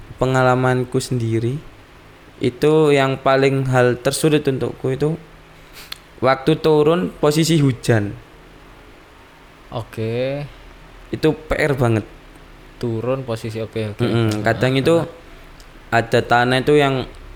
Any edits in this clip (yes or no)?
no